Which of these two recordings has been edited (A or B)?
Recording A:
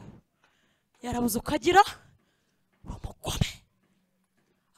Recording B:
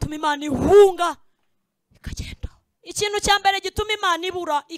B